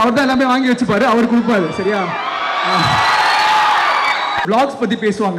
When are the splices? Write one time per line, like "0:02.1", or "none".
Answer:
0:04.4